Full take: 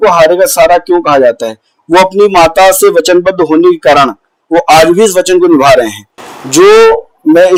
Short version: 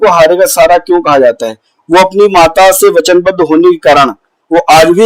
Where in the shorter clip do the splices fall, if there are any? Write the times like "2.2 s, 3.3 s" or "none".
none